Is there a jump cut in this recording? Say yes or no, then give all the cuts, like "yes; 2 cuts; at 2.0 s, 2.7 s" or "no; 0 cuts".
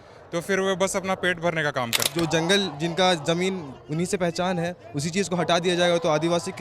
yes; 1 cut; at 2.0 s